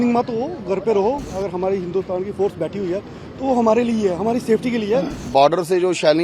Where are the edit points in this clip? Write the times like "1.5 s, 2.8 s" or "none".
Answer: 1.3 s, 5.3 s